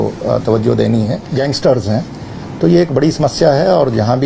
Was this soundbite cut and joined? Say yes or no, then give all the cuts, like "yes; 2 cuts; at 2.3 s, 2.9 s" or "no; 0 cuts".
yes; 1 cut; at 1.2 s